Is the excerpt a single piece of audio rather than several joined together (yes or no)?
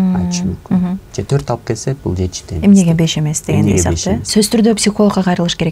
no